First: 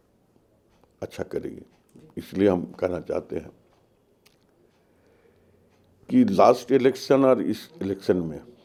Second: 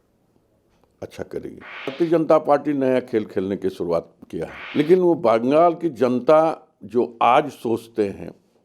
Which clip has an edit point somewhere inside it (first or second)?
second